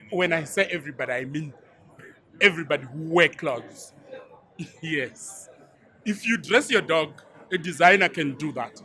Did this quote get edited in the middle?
no; 0 cuts

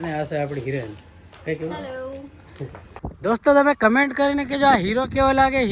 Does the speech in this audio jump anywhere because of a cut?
yes; 1 cut; at 2.8 s

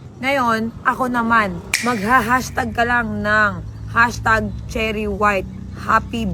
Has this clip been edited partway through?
yes; 1 cut; at 1.6 s

